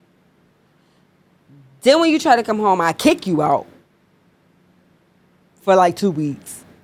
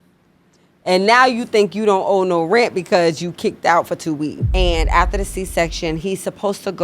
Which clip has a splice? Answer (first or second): second